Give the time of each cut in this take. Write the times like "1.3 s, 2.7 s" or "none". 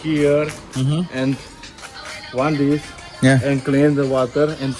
none

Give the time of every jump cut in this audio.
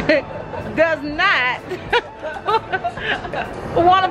none

